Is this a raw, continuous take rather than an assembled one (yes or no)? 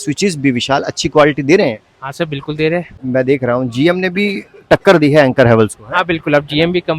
no